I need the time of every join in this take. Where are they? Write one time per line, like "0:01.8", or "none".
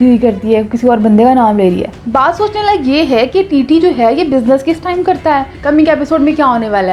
0:01.9
0:05.6